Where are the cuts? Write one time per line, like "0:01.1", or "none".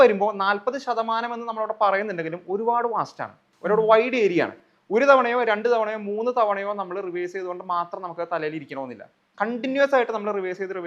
none